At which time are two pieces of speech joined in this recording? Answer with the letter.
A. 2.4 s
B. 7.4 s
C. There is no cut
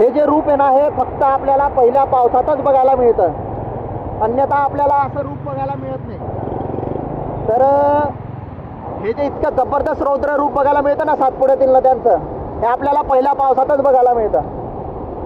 C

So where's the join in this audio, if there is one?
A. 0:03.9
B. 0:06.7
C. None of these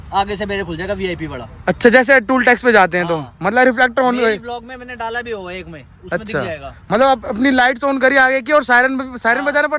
C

